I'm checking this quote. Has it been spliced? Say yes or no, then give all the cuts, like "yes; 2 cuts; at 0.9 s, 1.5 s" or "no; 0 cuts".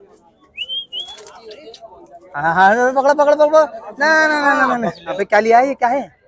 yes; 1 cut; at 5.2 s